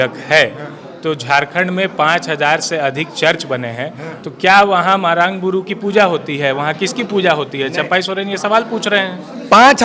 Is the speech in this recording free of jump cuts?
yes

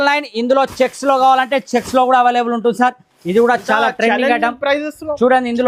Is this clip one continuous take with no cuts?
yes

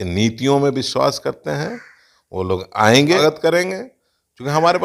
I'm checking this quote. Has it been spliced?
yes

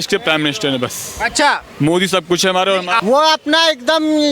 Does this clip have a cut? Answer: yes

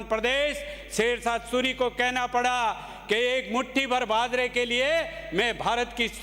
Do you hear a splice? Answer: no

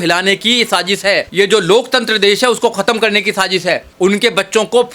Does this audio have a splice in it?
yes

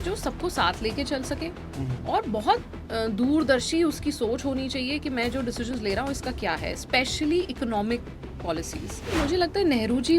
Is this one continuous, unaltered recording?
no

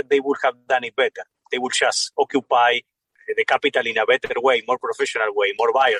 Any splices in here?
no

